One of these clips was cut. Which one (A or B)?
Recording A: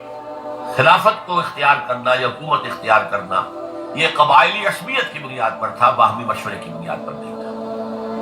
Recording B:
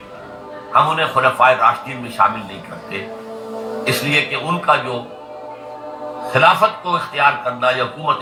A